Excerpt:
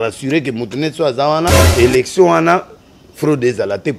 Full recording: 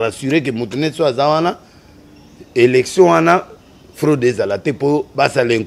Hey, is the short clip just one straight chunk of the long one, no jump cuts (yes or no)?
no